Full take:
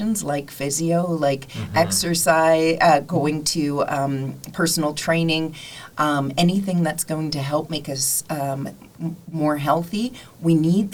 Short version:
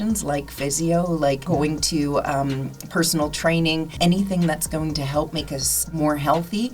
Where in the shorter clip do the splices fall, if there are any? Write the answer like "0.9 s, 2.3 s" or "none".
1.4 s, 3.9 s, 5.8 s